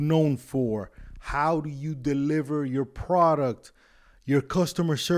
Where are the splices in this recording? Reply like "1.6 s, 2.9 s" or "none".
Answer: none